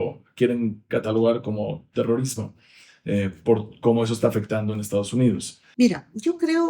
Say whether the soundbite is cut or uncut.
cut